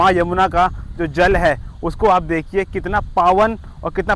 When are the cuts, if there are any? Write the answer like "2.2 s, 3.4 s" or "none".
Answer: none